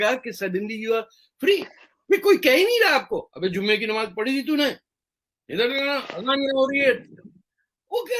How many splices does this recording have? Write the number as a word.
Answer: zero